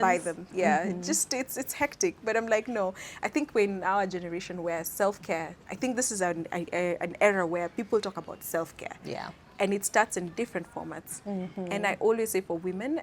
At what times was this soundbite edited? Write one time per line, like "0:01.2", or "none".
none

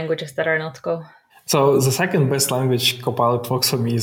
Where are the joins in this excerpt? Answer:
none

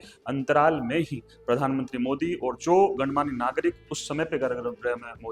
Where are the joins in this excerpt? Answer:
none

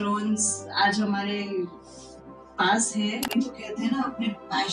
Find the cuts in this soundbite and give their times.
0:03.3

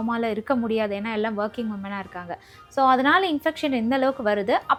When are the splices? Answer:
none

